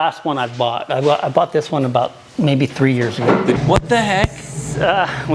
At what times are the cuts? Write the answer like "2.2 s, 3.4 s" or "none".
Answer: 3.5 s